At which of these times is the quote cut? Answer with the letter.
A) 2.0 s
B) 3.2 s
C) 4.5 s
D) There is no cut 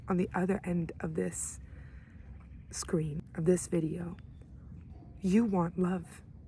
B